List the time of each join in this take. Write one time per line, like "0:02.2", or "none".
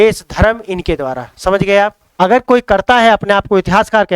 0:02.0